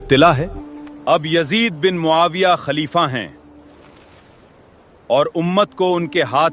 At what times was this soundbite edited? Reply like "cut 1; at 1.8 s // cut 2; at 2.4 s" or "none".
cut 1; at 0.9 s

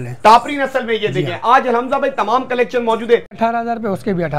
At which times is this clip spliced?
cut 1; at 3.3 s

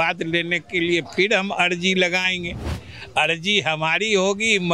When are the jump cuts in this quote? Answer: none

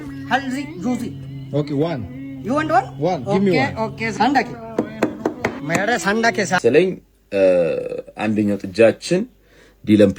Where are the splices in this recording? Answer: cut 1; at 6.6 s

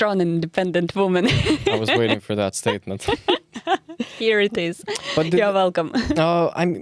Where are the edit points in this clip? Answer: none

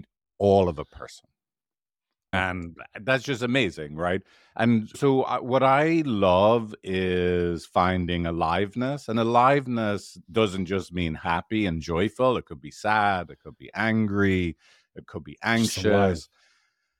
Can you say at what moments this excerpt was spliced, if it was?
cut 1; at 2.3 s

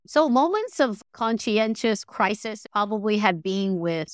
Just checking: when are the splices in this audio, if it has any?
cut 1; at 0.9 s

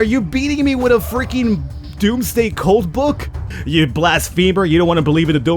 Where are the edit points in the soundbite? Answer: cut 1; at 3.5 s

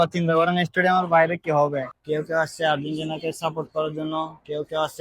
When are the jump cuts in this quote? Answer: cut 1; at 1.9 s

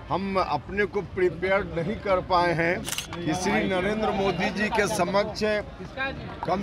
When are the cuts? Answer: cut 1; at 3.0 s

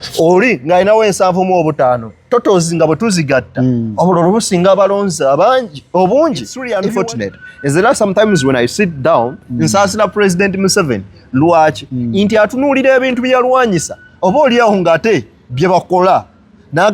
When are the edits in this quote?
cut 1; at 6.7 s

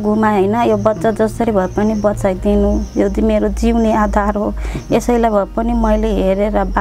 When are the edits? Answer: none

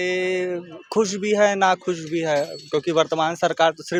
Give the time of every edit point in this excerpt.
none

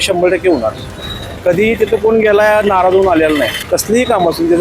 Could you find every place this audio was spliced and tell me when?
cut 1; at 3.6 s

